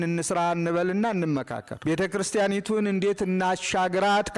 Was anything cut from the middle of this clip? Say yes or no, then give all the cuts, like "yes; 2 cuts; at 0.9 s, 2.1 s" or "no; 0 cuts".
yes; 1 cut; at 1.6 s